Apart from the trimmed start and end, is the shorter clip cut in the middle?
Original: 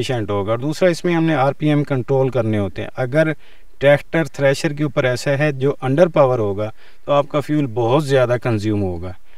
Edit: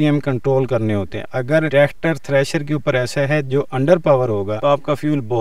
yes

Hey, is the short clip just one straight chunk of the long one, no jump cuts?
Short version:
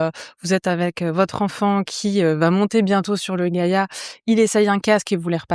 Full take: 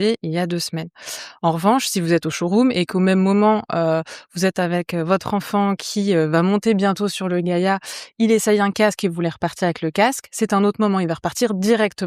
yes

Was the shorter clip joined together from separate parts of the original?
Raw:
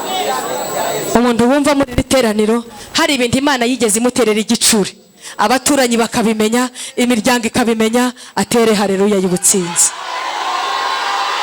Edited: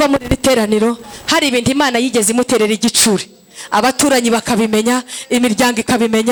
no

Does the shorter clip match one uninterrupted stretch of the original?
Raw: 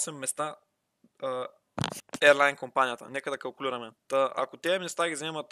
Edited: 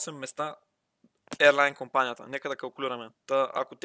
no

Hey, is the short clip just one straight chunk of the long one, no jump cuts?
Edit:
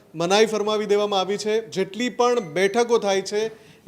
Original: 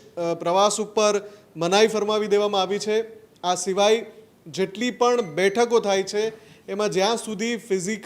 no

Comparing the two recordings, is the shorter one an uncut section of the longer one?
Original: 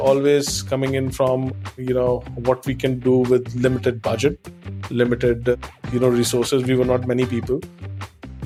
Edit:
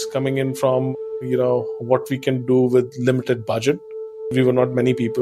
no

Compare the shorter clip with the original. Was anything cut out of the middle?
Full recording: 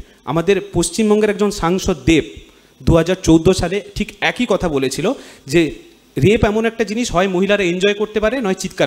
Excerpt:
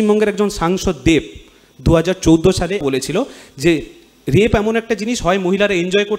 yes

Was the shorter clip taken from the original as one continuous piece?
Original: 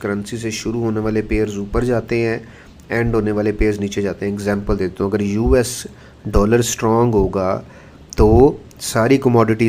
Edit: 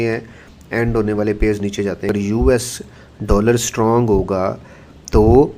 no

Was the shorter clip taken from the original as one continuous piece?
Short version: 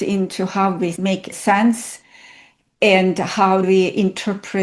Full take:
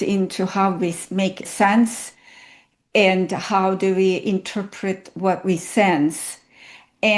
no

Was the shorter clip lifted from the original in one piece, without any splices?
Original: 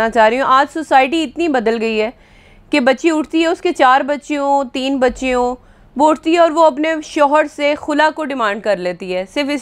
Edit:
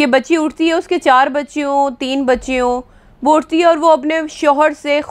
yes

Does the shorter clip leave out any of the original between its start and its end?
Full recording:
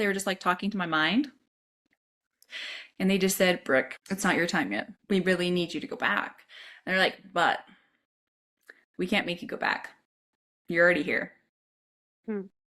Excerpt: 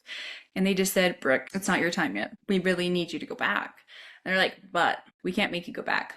yes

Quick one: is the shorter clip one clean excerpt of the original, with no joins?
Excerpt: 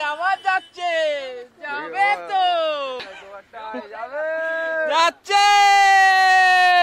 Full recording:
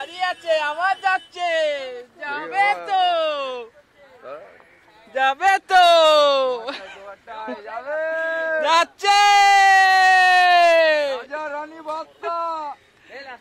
no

